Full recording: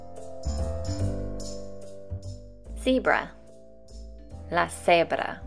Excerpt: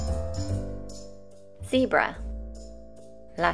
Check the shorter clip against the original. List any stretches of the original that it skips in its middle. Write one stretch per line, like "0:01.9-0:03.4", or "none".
0:02.0-0:02.6